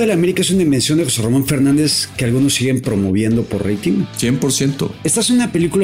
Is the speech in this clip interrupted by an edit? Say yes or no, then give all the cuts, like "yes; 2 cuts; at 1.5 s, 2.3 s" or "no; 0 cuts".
yes; 2 cuts; at 4.1 s, 4.9 s